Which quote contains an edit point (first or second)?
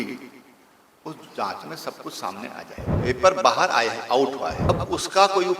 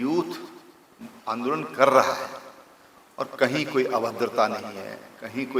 first